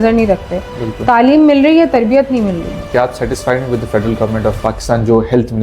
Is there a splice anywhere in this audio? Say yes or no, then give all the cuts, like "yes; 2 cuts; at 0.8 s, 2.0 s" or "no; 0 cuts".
yes; 2 cuts; at 2.9 s, 4.6 s